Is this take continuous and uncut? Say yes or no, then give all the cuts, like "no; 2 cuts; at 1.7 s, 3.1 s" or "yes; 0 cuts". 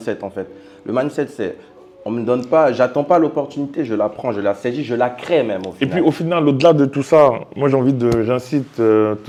yes; 0 cuts